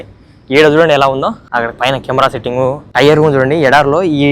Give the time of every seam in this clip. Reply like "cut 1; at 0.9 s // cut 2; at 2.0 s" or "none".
cut 1; at 1.4 s // cut 2; at 2.8 s